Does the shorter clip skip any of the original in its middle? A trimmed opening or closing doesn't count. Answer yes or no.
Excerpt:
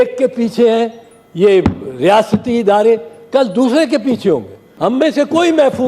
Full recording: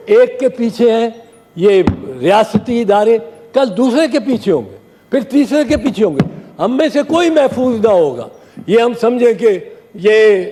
yes